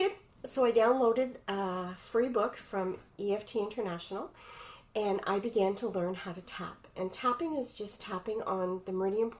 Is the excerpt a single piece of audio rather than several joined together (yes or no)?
yes